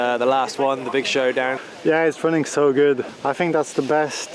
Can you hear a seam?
yes; 2 cuts; at 1.6 s, 3.1 s

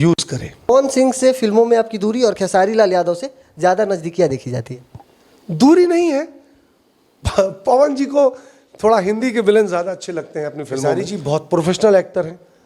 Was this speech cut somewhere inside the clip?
yes; 2 cuts; at 0.7 s, 11.0 s

